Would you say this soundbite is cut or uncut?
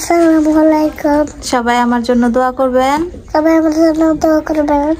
uncut